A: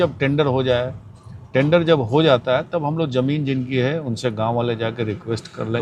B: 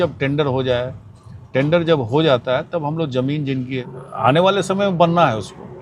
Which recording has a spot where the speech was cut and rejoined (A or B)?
B